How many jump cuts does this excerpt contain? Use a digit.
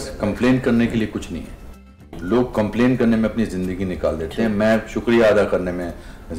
0